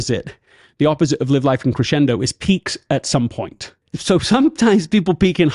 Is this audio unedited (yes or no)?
no